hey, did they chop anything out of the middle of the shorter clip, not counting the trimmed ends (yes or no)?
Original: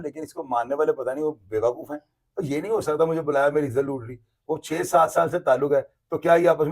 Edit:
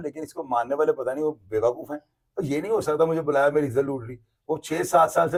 no